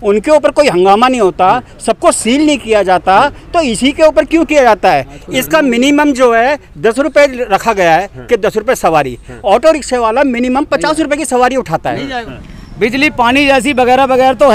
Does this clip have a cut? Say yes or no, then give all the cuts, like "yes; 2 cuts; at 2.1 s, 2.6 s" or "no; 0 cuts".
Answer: yes; 1 cut; at 12.2 s